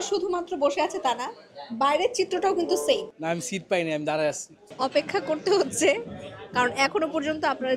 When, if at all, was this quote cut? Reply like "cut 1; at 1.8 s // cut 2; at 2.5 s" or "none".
cut 1; at 3.1 s // cut 2; at 4.5 s

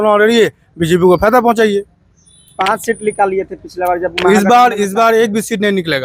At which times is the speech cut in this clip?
none

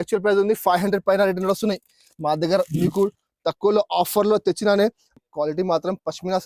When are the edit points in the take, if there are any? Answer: cut 1; at 5.1 s

